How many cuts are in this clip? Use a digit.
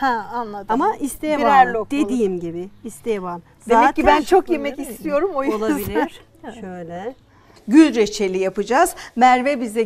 1